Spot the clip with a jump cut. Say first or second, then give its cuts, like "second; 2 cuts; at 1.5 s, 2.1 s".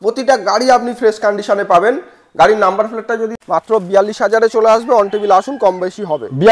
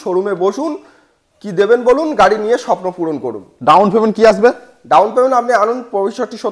first; 1 cut; at 3.3 s